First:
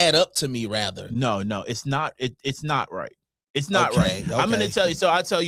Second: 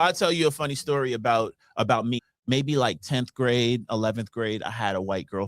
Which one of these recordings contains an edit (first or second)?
second